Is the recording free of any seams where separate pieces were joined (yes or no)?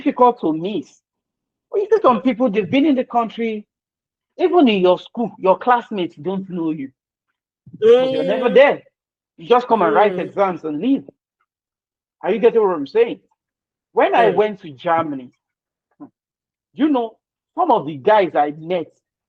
yes